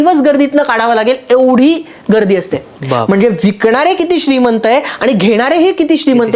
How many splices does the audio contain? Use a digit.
0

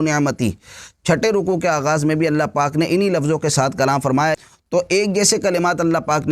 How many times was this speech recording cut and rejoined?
1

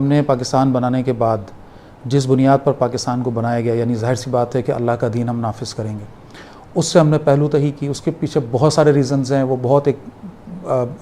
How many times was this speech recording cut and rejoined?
0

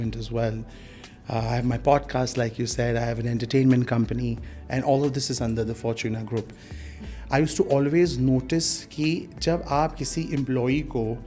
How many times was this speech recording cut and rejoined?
1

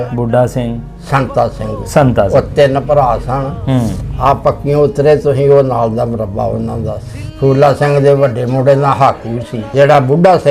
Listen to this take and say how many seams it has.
2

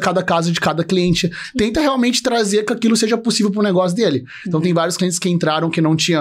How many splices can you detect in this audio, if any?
0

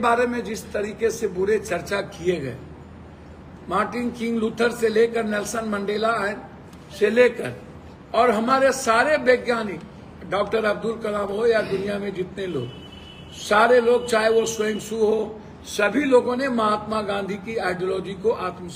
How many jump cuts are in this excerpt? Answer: 0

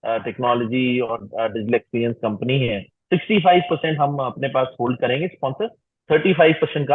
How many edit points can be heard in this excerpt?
1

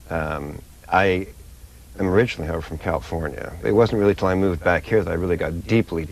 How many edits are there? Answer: 0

